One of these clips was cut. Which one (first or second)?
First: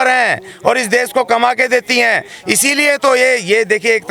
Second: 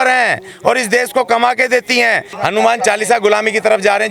second